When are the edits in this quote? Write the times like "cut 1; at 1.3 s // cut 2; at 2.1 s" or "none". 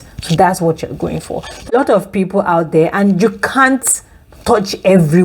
cut 1; at 1.6 s